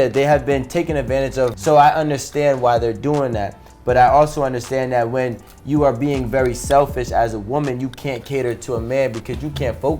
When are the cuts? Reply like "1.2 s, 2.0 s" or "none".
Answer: 1.6 s

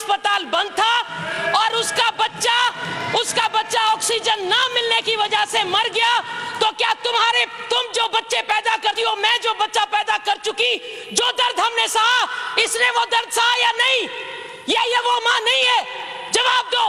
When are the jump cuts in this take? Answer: none

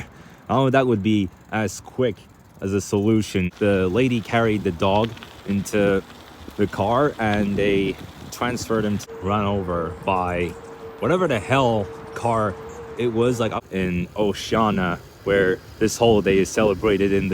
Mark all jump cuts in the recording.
3.5 s, 9.0 s, 13.5 s

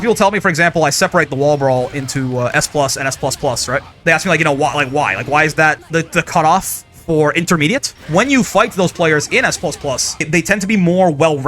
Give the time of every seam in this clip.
3.9 s, 5.8 s, 7.9 s, 10.2 s

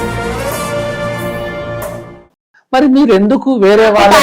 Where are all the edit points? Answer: 2.4 s

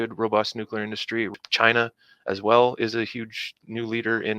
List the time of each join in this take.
1.3 s

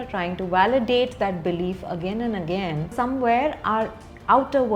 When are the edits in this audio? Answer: 2.8 s

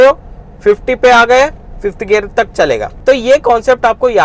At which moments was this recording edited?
2.9 s

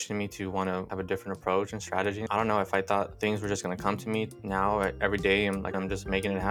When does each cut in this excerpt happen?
0.9 s, 2.2 s, 3.1 s, 4.3 s, 5.7 s

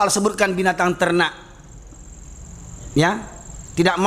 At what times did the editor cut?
none

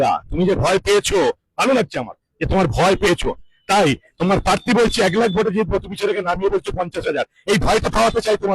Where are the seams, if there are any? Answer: none

